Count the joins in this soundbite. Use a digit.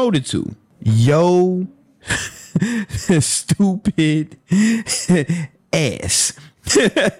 0